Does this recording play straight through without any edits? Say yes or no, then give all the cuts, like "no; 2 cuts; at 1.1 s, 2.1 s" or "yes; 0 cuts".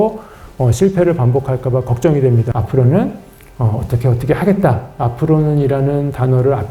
no; 1 cut; at 2.5 s